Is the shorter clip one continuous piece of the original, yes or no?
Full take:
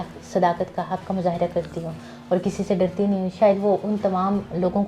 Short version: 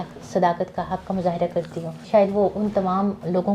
no